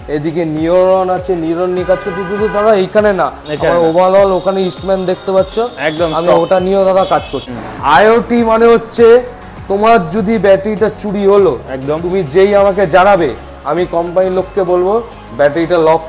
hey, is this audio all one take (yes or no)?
no